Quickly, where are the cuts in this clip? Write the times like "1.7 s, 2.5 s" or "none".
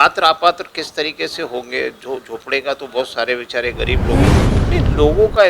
4.3 s